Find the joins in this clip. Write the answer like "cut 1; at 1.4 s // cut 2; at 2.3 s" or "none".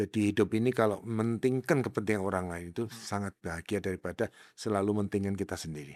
none